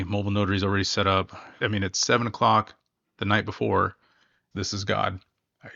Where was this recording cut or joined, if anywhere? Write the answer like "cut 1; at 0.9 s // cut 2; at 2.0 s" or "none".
cut 1; at 1.5 s // cut 2; at 4.4 s